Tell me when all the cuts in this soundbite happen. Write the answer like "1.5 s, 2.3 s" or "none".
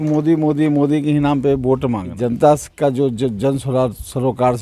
2.1 s